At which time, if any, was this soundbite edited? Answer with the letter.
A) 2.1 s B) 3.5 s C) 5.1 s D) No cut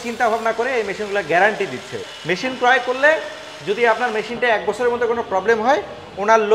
A